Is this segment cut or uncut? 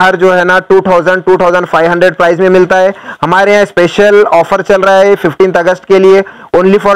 uncut